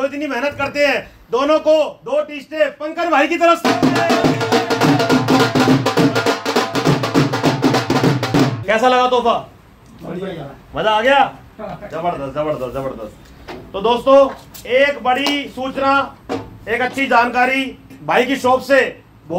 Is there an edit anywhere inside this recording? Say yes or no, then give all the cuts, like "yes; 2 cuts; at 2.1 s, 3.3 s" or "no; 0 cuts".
no; 0 cuts